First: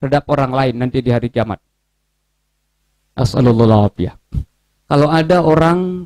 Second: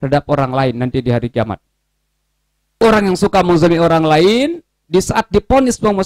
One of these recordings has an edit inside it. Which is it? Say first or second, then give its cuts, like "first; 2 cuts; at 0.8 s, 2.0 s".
second; 1 cut; at 2.8 s